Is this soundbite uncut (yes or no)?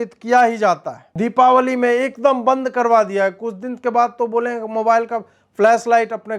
no